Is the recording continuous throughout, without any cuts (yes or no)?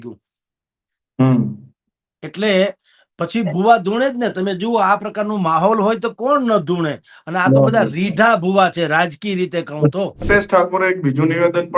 no